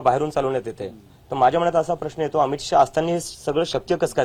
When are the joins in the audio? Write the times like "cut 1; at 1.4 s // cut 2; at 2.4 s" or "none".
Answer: none